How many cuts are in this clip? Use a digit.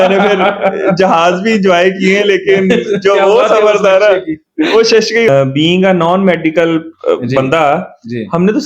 1